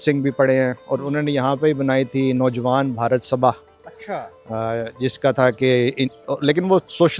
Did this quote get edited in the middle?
no; 0 cuts

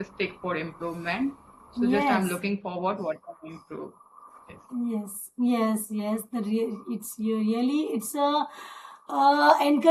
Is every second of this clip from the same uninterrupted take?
yes; 0 cuts

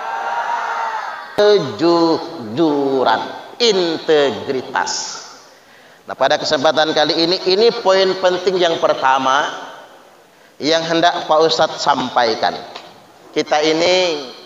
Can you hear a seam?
yes; 1 cut; at 1.4 s

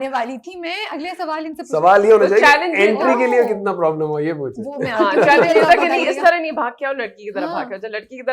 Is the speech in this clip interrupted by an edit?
no; 0 cuts

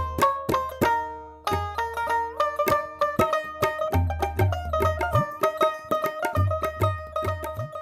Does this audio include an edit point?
no; 0 cuts

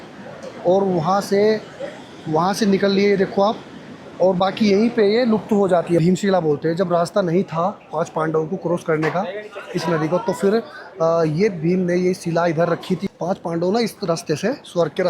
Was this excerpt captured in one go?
no; 2 cuts; at 6.0 s, 13.1 s

